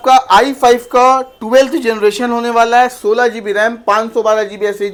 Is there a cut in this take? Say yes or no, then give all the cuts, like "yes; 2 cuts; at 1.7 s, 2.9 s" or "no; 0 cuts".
no; 0 cuts